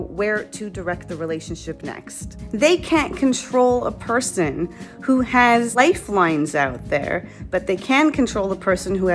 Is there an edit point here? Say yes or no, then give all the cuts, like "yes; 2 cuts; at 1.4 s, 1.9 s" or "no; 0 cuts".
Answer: yes; 2 cuts; at 2.4 s, 5.7 s